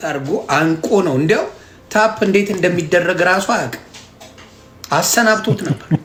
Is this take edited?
no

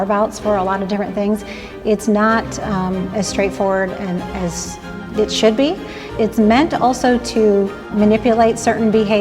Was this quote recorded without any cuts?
no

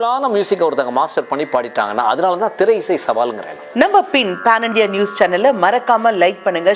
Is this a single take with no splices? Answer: no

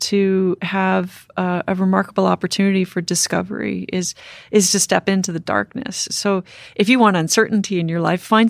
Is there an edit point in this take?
no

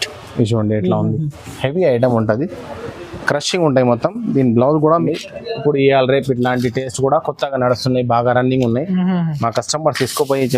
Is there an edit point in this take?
yes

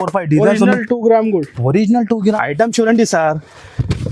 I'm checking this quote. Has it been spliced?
yes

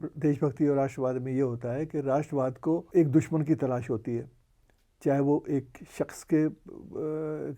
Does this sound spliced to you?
yes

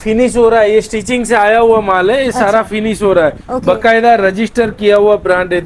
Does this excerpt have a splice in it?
no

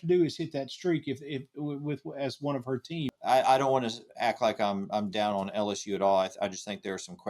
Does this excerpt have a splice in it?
yes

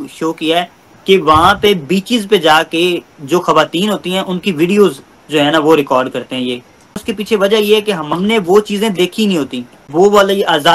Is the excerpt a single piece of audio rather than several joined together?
no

